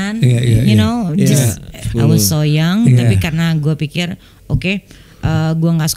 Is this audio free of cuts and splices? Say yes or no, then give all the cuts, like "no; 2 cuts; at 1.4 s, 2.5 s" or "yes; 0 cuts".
no; 1 cut; at 1.9 s